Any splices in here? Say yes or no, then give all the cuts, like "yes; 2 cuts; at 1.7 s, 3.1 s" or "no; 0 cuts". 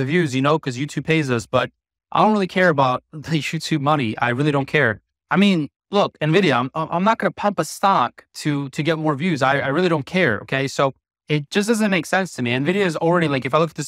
no; 0 cuts